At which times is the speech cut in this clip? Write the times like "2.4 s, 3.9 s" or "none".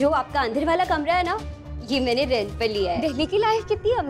3.0 s